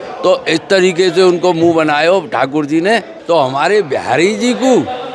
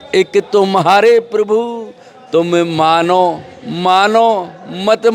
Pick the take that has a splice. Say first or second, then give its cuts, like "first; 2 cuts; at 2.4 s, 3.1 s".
first; 1 cut; at 3.1 s